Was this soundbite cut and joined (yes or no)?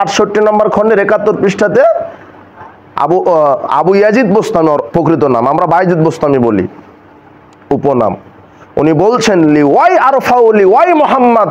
no